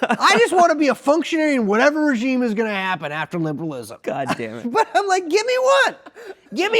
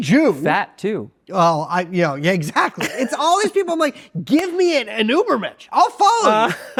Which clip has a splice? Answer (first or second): first